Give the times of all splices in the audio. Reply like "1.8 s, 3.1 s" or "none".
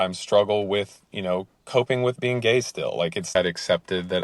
3.3 s